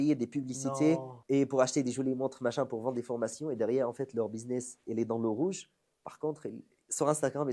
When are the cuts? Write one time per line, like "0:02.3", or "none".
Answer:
0:01.1